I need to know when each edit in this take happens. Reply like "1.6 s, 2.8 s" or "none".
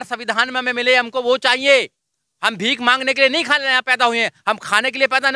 none